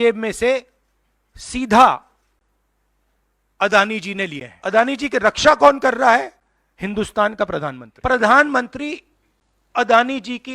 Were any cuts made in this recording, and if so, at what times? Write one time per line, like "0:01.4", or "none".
0:04.5
0:07.9